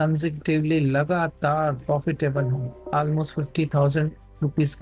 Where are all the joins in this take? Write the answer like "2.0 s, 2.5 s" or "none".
2.8 s

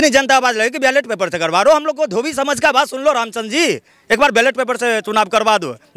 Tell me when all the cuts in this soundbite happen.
none

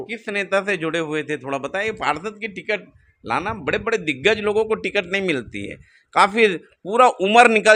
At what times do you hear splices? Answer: none

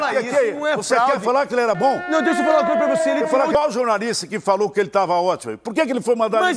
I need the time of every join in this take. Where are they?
3.5 s

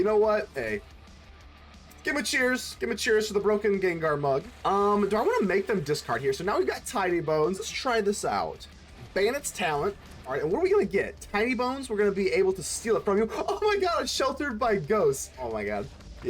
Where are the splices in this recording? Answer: 4.5 s, 7.6 s, 10.3 s, 15.5 s

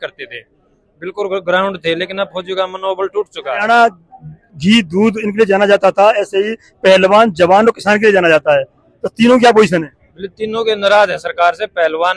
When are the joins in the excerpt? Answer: 3.5 s

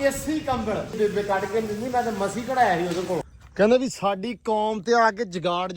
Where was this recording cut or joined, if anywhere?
0.9 s, 3.3 s

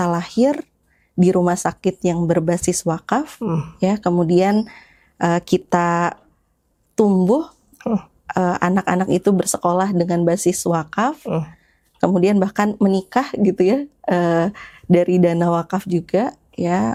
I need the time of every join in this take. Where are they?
none

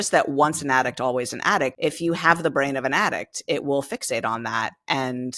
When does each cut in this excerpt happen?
1.7 s

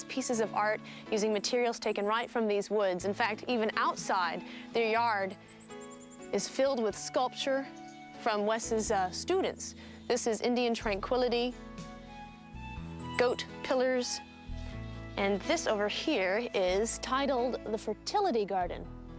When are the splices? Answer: none

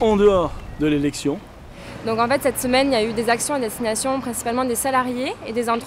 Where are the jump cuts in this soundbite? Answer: 1.6 s

